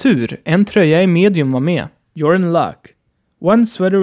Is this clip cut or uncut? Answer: uncut